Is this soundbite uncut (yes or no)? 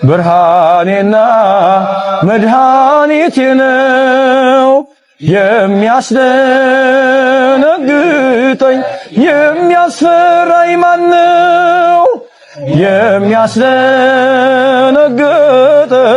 yes